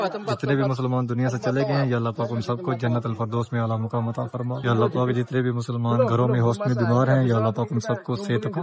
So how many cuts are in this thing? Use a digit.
1